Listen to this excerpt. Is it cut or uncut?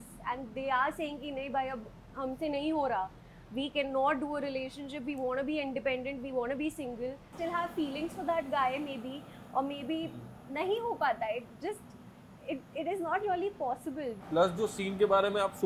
cut